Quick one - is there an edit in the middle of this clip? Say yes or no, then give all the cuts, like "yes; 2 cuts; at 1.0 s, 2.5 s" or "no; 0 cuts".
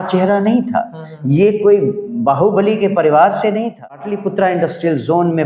yes; 1 cut; at 4.1 s